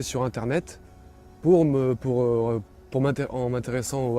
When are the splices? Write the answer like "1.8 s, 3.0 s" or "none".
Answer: none